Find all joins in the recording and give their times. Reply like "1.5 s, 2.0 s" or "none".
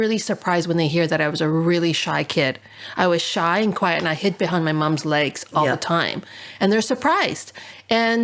none